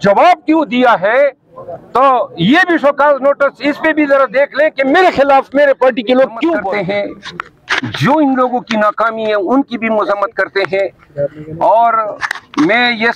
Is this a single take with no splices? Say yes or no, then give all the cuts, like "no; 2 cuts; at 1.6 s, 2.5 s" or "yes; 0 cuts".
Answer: no; 1 cut; at 6.7 s